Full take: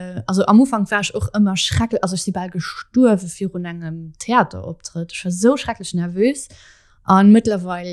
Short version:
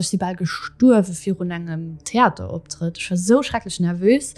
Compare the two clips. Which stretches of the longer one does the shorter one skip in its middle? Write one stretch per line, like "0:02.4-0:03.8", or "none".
none